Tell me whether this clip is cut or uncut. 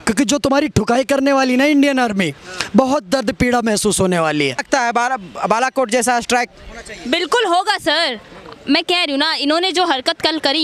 cut